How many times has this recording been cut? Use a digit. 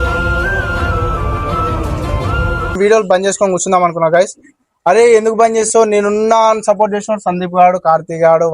1